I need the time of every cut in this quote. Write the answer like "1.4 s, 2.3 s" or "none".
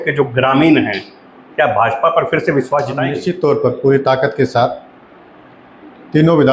3.2 s